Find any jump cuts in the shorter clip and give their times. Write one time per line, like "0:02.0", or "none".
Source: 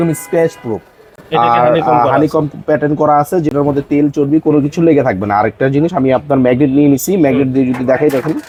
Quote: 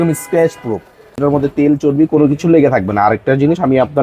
0:01.2